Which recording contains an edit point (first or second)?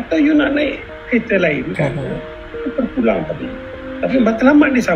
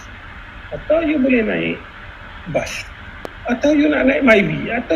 second